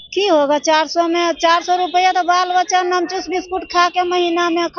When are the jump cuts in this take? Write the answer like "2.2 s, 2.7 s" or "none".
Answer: none